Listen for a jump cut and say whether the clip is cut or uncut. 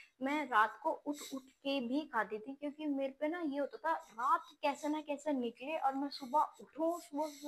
uncut